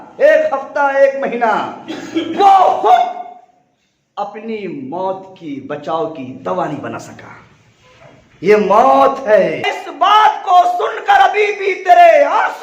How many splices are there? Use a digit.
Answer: 1